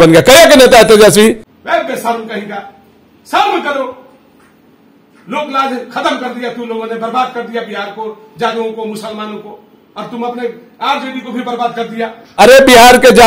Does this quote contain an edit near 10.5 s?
no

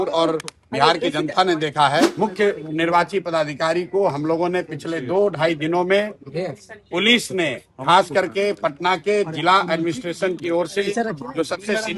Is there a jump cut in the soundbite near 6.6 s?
no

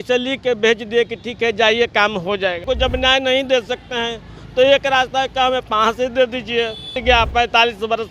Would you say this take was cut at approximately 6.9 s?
yes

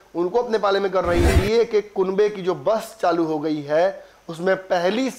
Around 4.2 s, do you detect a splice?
no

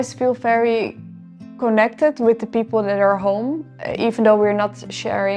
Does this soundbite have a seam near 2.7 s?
no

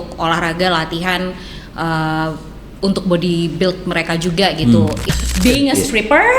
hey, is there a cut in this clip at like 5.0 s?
yes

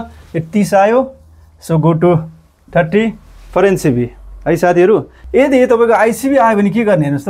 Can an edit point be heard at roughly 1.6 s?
no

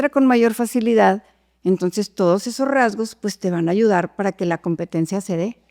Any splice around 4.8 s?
no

